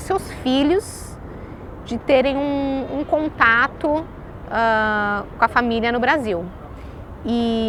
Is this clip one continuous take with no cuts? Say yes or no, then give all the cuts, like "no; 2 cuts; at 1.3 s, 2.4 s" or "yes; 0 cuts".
yes; 0 cuts